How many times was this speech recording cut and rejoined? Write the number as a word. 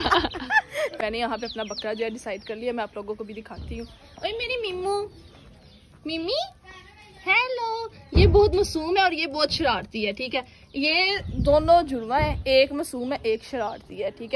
one